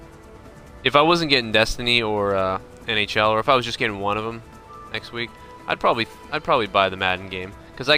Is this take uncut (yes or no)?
yes